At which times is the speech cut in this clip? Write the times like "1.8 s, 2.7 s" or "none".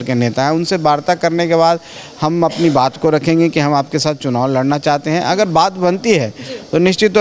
none